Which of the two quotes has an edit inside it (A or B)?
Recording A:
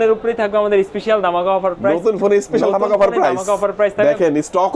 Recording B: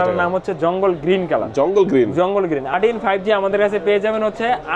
B